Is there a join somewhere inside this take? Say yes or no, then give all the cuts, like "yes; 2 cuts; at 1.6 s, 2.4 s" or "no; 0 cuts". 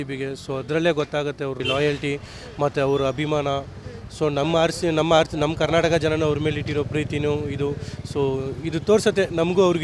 no; 0 cuts